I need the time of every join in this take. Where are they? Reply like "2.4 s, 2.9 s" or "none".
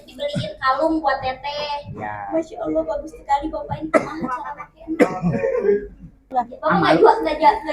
6.3 s